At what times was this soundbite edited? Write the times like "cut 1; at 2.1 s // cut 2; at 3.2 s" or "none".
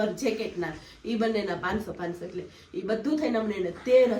none